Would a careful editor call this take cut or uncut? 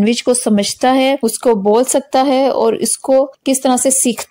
cut